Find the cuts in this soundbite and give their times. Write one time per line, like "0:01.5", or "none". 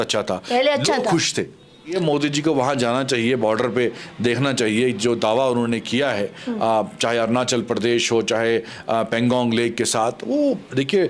0:01.9